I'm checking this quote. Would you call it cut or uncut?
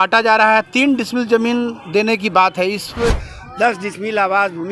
cut